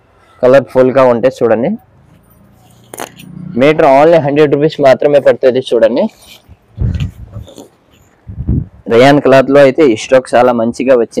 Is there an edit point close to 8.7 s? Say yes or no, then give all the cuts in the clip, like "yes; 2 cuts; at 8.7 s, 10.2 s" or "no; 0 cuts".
yes; 1 cut; at 8.7 s